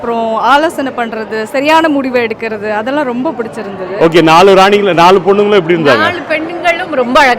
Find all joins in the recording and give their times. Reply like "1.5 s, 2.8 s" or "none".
none